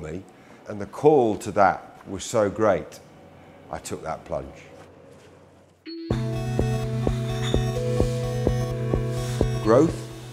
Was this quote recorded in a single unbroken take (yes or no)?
no